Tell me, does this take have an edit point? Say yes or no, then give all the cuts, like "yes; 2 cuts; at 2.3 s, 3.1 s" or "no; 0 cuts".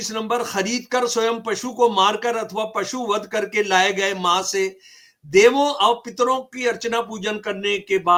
no; 0 cuts